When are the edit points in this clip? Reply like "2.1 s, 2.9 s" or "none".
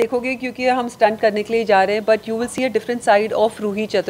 none